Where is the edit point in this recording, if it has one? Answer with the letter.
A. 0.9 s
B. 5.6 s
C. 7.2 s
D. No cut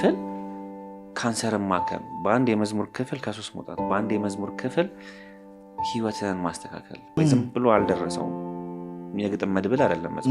C